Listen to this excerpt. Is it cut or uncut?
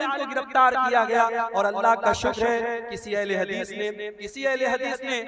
uncut